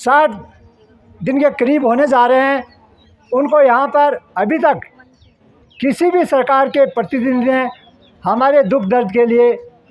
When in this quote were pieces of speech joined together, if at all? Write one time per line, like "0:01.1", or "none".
none